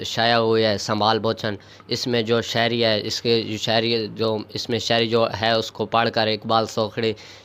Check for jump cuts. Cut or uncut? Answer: uncut